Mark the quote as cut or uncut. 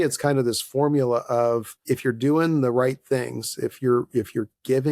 cut